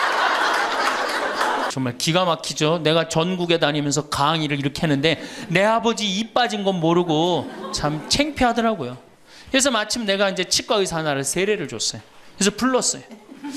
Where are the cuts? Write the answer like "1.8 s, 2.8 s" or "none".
1.7 s